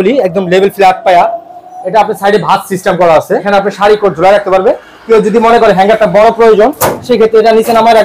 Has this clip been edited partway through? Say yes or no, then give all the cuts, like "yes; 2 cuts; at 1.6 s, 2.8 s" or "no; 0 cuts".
yes; 1 cut; at 3.4 s